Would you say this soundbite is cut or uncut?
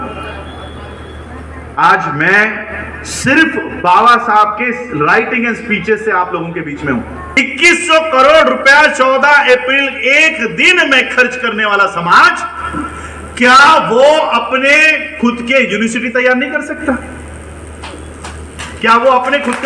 cut